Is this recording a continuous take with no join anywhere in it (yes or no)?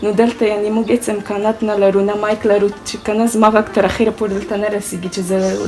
yes